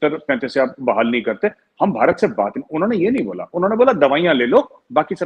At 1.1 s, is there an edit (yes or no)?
no